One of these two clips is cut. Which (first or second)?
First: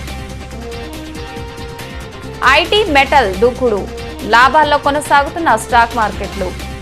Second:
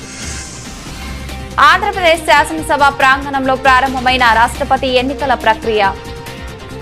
second